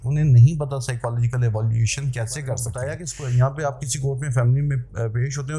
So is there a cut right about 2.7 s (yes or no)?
yes